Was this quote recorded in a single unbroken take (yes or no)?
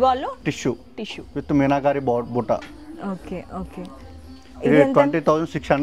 yes